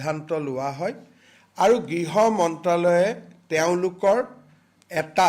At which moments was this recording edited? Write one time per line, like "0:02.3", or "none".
none